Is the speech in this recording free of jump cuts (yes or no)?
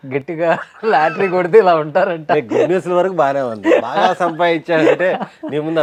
yes